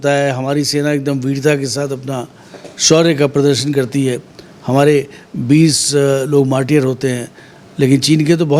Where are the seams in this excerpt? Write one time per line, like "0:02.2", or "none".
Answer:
none

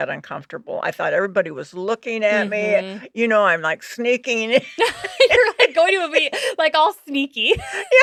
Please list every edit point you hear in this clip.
none

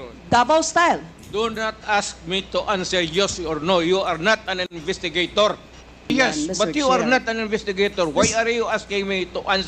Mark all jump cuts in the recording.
0:06.1

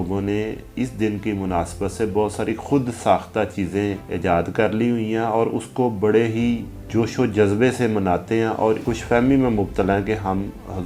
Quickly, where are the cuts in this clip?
0:04.1
0:06.7
0:08.8

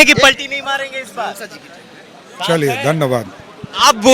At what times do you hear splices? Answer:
none

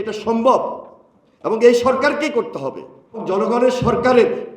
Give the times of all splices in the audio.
0:03.2

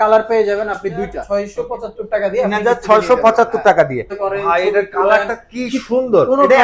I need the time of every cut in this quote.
0:01.2
0:04.1

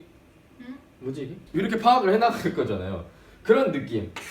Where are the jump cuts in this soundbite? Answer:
0:01.4

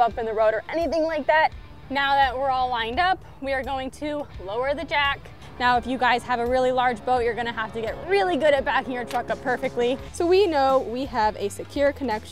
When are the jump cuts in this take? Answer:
0:01.7
0:05.4
0:10.1

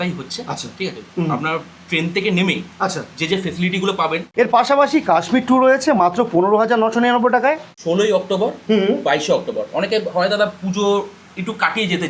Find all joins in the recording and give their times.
0:04.2
0:07.7

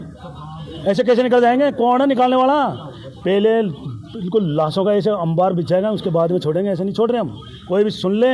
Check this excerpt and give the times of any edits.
none

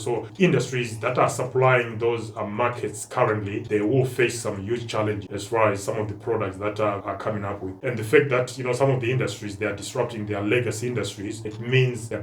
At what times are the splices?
0:07.0

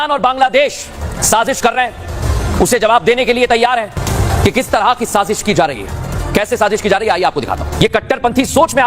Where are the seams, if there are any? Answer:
0:04.0
0:07.7

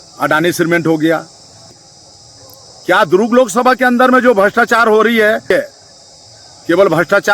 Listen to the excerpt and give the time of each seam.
0:01.7
0:05.5

